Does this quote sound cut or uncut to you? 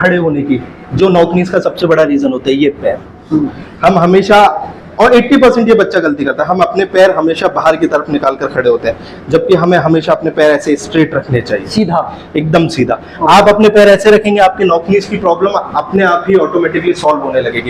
uncut